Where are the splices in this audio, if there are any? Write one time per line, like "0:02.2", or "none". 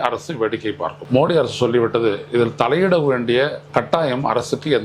0:01.0
0:03.6